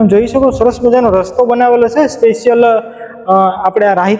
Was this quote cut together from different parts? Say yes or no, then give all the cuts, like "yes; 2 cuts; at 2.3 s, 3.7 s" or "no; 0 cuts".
no; 0 cuts